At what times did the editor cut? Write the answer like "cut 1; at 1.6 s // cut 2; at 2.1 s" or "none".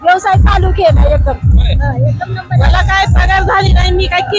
none

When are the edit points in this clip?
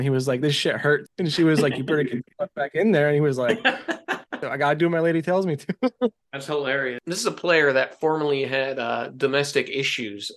cut 1; at 4.5 s // cut 2; at 7.0 s

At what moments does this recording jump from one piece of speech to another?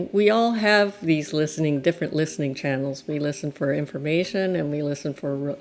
none

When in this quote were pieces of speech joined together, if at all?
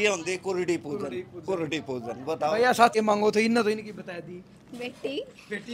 cut 1; at 2.9 s

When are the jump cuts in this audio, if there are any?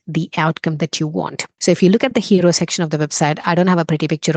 cut 1; at 1.5 s

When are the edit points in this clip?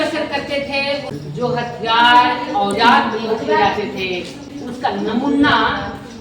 cut 1; at 1.1 s // cut 2; at 4.4 s

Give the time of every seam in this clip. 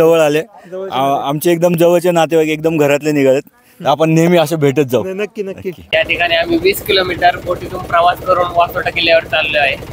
cut 1; at 5.7 s

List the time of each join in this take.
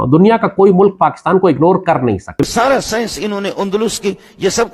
cut 1; at 2.4 s

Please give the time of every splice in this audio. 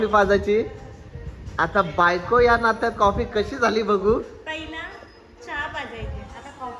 none

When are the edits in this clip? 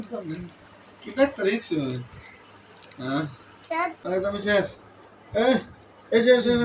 cut 1; at 4.0 s

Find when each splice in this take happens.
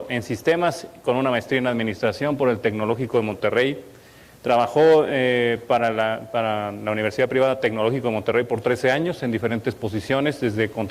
cut 1; at 9.4 s

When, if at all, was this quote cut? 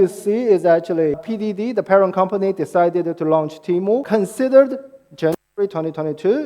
cut 1; at 1.3 s // cut 2; at 4.0 s

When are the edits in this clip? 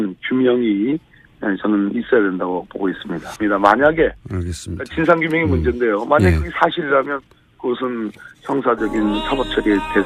cut 1; at 3.2 s

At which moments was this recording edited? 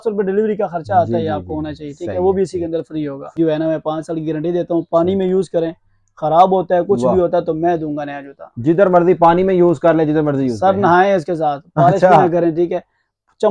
cut 1; at 3.3 s

